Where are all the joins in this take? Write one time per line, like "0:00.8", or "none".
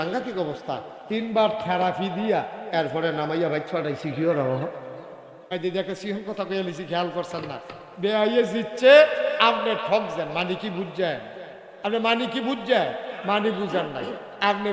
0:05.5

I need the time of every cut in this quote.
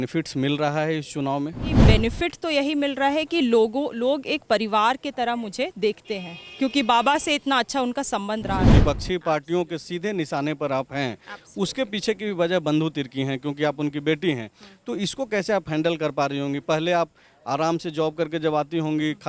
0:01.8
0:08.7

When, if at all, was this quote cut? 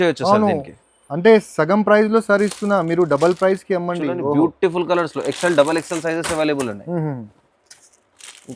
none

